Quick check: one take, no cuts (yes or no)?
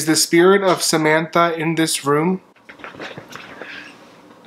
no